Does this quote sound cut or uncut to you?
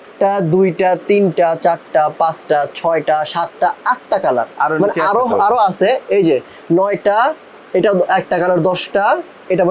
uncut